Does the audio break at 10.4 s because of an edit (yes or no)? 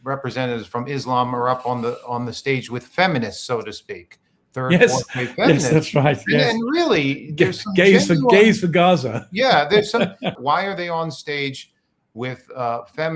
yes